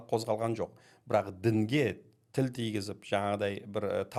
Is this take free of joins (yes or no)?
yes